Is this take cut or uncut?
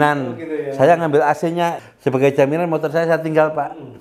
cut